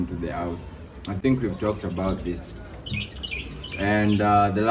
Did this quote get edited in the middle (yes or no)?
no